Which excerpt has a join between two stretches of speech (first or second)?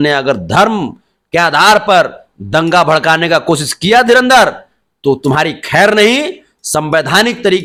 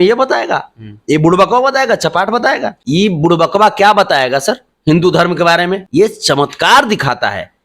second